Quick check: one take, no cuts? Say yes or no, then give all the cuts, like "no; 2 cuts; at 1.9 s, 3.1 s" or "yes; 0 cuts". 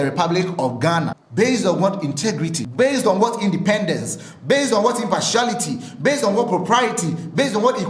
no; 2 cuts; at 1.2 s, 2.6 s